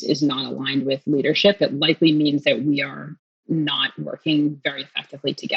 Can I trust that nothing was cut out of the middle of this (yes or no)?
yes